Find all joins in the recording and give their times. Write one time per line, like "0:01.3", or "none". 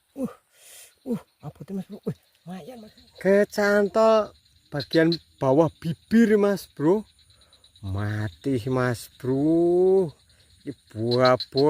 0:02.7